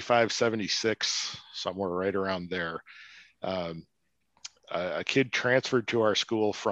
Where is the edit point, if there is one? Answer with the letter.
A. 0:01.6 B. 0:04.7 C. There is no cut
C